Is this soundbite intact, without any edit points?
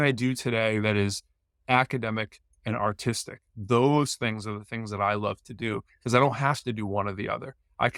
yes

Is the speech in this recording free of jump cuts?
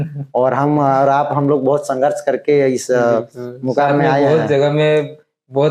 yes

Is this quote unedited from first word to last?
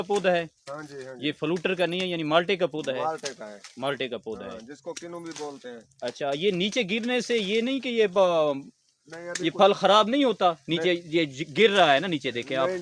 yes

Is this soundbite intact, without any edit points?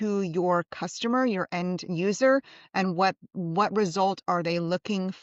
yes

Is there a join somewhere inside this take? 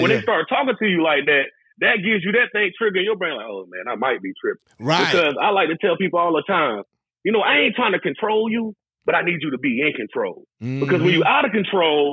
no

